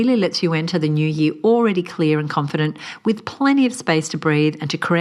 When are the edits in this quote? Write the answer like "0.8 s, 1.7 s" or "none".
none